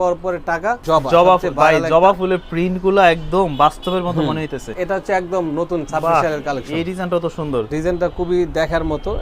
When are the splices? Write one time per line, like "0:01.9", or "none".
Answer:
0:00.8
0:04.7
0:07.7